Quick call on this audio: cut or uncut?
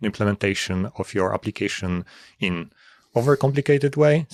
uncut